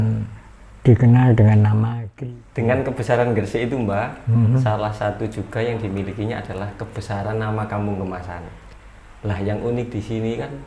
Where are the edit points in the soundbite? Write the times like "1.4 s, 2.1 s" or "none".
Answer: 2.0 s